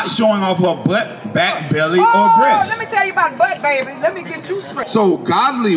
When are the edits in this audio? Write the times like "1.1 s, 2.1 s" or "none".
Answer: 4.8 s